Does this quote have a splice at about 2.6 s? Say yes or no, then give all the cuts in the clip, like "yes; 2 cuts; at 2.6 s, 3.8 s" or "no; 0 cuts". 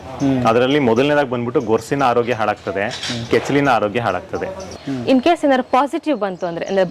no; 1 cut; at 4.8 s